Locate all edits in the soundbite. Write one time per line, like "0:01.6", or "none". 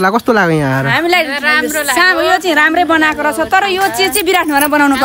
none